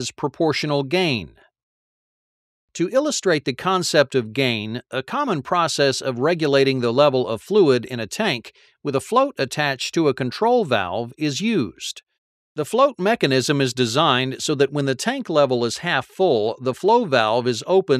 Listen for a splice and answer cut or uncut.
cut